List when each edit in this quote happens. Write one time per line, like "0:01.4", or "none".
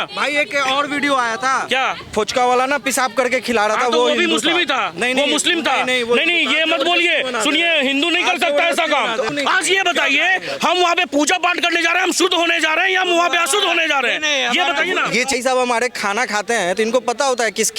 0:09.3
0:15.3